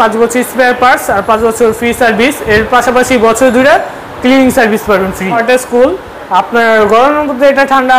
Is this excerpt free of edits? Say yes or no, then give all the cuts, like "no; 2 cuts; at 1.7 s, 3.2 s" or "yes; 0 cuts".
no; 1 cut; at 5.4 s